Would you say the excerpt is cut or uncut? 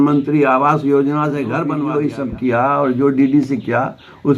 cut